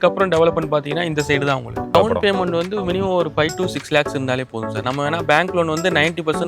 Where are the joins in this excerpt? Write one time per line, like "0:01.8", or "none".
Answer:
0:01.9